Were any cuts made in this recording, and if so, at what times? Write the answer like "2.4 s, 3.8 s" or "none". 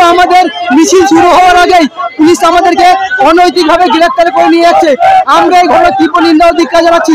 none